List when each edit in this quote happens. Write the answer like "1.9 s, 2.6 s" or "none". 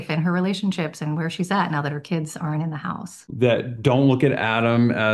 3.1 s